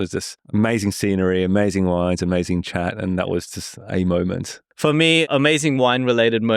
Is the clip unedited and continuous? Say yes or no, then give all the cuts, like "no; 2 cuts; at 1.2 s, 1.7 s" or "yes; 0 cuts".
no; 1 cut; at 4.6 s